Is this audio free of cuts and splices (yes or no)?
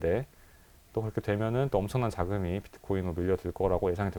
yes